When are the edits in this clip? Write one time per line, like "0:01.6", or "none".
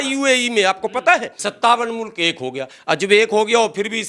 0:01.4